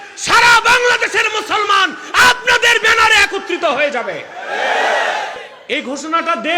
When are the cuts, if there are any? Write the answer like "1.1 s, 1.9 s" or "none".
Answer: 5.5 s

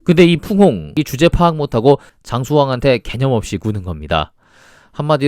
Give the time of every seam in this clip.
0.9 s

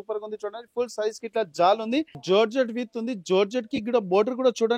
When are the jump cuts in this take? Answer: 2.2 s

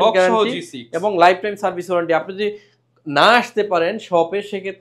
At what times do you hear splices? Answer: none

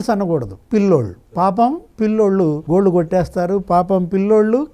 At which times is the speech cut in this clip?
none

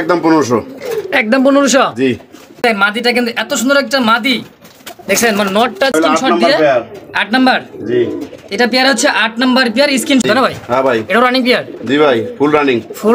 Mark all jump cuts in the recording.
2.6 s, 5.9 s, 10.2 s

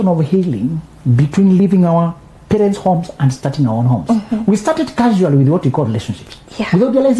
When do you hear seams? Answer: none

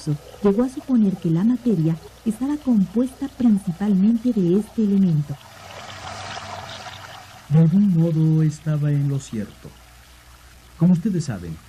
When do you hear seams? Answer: 10.0 s

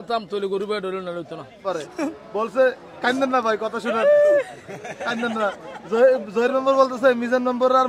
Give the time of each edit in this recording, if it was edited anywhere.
1.6 s

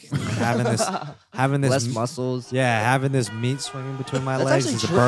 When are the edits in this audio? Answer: none

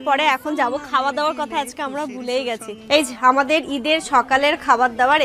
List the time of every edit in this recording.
2.8 s

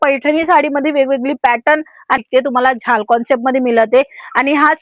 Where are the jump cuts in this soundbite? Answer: 2.2 s

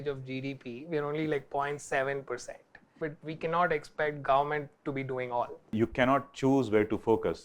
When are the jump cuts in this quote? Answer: 5.7 s

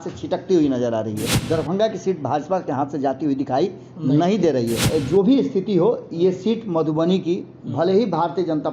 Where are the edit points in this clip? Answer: 1.3 s, 4.8 s

